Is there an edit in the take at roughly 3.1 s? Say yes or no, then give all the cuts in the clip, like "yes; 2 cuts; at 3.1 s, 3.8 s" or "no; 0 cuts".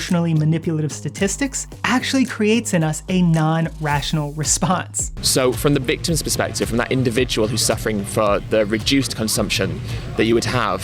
no; 1 cut; at 5.0 s